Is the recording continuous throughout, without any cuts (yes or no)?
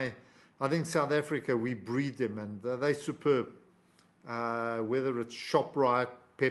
yes